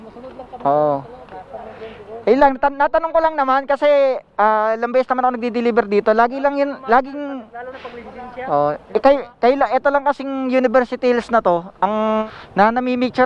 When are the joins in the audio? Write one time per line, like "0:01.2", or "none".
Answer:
0:12.2